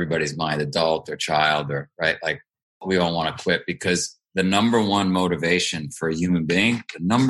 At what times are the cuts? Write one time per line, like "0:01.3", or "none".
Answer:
0:02.8